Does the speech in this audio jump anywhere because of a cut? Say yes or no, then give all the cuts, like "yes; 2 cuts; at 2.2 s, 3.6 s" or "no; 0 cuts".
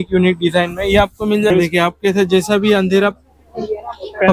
yes; 1 cut; at 1.5 s